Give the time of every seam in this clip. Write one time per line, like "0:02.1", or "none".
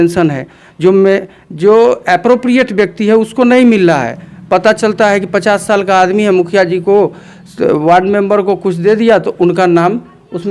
none

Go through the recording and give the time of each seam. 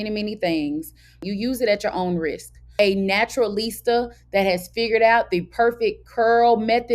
0:01.2
0:02.7

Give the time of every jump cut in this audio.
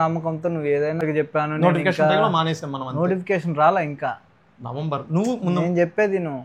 0:01.0

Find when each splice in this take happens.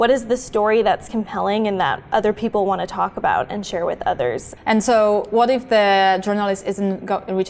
0:04.5

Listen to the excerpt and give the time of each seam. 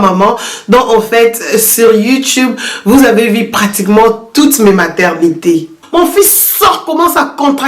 0:05.8

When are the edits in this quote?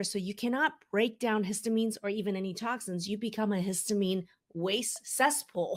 none

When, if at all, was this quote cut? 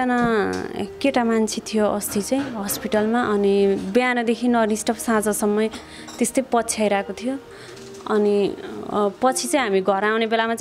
none

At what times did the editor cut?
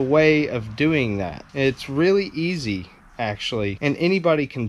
0:01.4
0:03.8

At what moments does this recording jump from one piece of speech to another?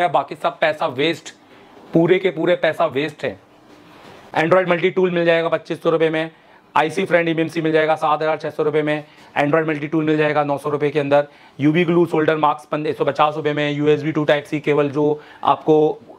none

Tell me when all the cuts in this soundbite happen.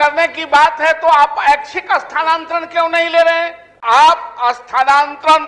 0:03.7

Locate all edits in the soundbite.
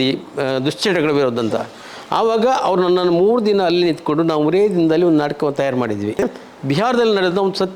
0:06.3

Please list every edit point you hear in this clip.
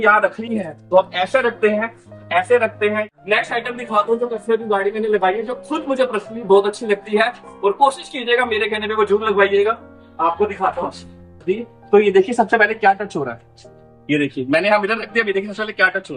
0:03.1
0:11.4

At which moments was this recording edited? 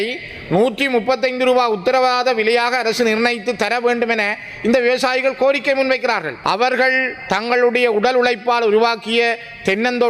0:06.3

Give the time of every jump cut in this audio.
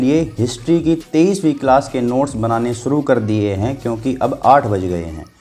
none

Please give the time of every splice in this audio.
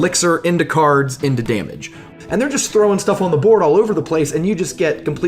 0:02.1

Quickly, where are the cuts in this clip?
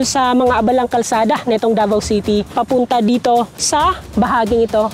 0:02.5
0:03.9

